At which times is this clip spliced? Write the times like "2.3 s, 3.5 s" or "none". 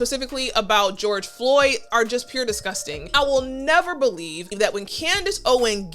3.1 s, 4.5 s